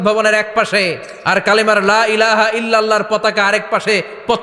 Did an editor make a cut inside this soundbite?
yes; 1 cut; at 1.1 s

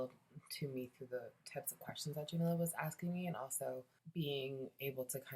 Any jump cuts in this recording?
yes; 1 cut; at 4.0 s

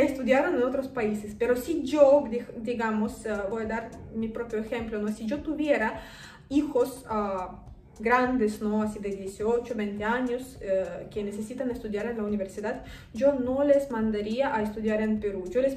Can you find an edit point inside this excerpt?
no; 0 cuts

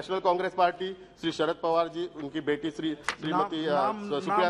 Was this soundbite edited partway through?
no; 0 cuts

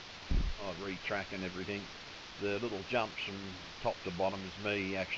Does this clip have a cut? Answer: no; 0 cuts

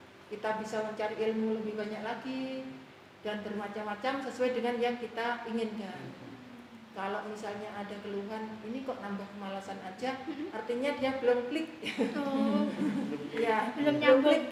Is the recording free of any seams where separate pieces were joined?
yes; 0 cuts

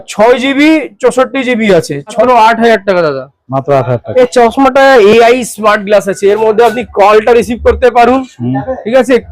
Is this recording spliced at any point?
yes; 2 cuts; at 2.2 s, 4.0 s

